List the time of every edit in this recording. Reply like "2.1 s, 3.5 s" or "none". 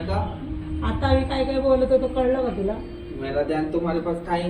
none